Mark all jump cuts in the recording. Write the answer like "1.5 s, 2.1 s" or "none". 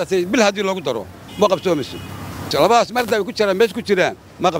2.5 s